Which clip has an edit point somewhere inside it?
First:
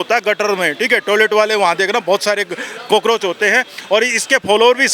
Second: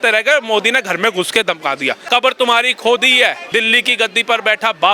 second; 2 cuts; at 2.0 s, 3.4 s

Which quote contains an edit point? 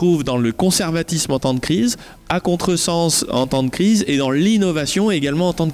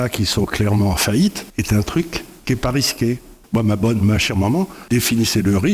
second; 4 cuts; at 1.4 s, 2.3 s, 3.4 s, 4.8 s

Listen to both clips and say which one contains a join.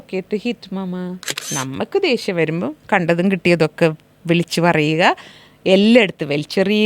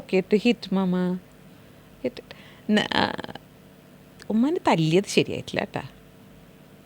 first; 1 cut; at 1.4 s

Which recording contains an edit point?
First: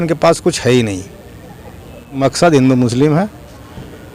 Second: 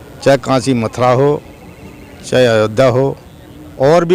first; 1 cut; at 2.2 s

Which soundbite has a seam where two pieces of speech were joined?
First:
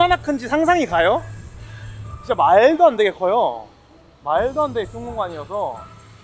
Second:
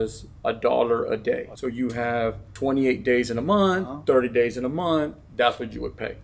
second; 2 cuts; at 1.5 s, 2.5 s

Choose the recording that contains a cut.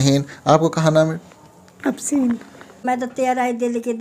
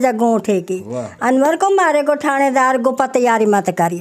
first; 1 cut; at 2.9 s

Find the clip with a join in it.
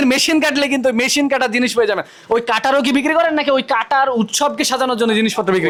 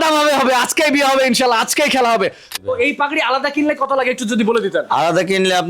second; 1 cut; at 2.6 s

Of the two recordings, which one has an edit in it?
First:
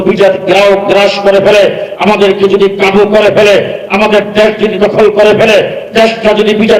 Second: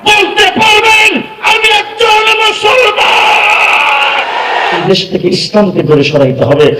second; 1 cut; at 4.8 s

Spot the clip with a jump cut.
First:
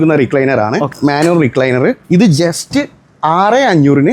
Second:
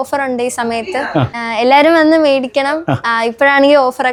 first; 2 cuts; at 0.9 s, 2.0 s

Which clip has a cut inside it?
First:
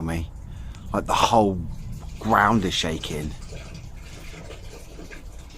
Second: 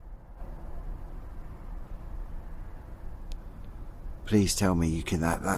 second; 1 cut; at 2.4 s

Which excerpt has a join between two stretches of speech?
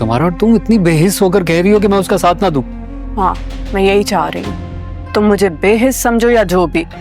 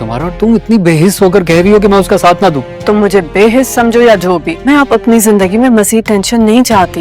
second; 2 cuts; at 2.7 s, 4.5 s

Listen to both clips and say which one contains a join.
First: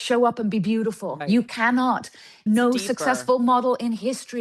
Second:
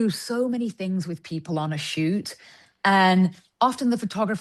first; 2 cuts; at 1.1 s, 2.4 s

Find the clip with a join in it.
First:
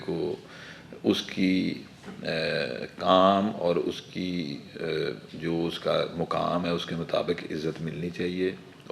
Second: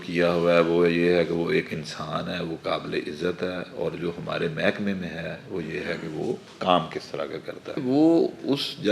second; 1 cut; at 7.8 s

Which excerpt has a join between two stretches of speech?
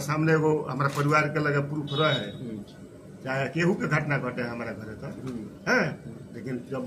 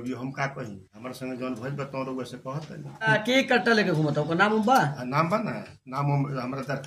second; 1 cut; at 3.1 s

